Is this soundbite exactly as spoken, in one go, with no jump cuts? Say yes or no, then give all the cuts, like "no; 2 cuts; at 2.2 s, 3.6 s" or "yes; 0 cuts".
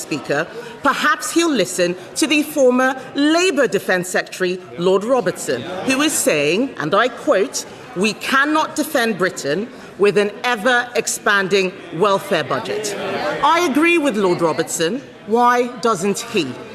yes; 0 cuts